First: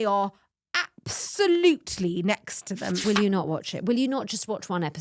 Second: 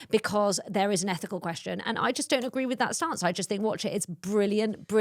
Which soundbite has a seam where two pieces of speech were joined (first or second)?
first